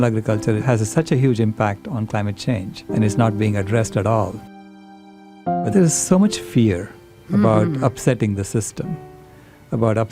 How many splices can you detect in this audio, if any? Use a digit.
1